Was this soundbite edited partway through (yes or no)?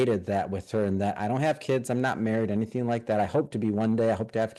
no